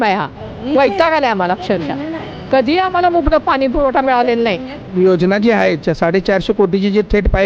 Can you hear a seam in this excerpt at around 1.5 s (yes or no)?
no